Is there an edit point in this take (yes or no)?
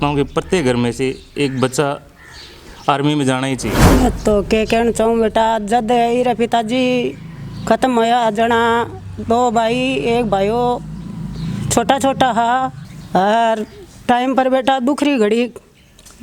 yes